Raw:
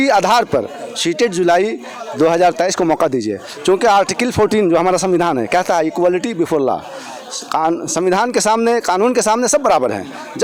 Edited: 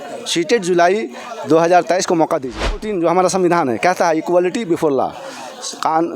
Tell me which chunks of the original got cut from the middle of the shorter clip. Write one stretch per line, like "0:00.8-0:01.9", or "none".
0:03.6-0:04.6